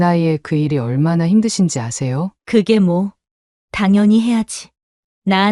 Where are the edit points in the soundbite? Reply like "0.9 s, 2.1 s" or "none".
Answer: 2.3 s